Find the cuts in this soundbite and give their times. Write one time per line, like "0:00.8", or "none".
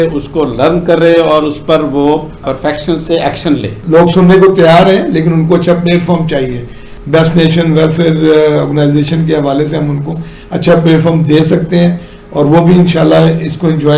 0:03.7